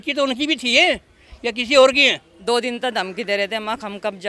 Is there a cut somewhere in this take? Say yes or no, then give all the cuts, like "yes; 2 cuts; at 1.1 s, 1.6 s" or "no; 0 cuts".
yes; 1 cut; at 2.3 s